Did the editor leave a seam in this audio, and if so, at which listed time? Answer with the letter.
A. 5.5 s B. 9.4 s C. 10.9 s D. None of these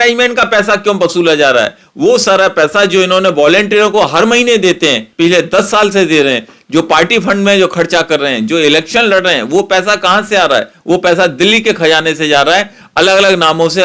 D